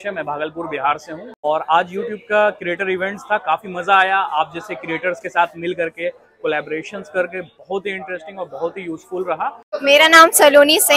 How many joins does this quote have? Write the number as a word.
two